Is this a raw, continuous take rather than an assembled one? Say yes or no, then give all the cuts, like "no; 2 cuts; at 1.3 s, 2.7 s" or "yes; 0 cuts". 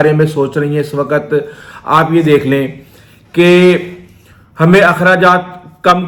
yes; 0 cuts